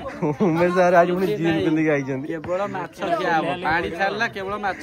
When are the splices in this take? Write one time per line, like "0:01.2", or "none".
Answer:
none